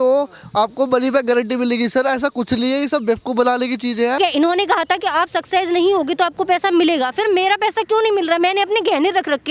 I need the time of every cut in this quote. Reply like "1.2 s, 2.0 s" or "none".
4.2 s